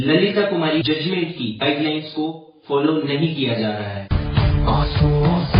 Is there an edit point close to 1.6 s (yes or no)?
yes